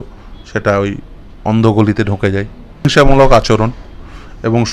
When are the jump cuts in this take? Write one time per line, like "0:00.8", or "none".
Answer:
0:02.9